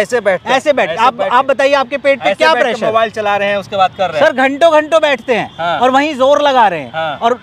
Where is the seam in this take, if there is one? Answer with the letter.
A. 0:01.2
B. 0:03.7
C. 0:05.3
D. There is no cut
D